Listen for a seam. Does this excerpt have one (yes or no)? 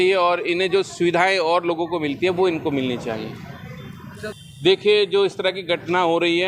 no